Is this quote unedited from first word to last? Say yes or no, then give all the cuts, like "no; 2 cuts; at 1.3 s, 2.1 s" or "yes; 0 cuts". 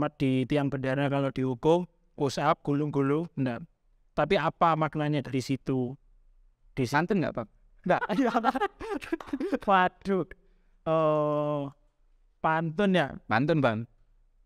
no; 1 cut; at 6.9 s